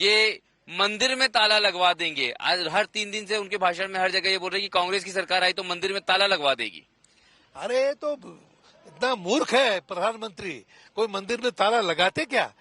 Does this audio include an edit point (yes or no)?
yes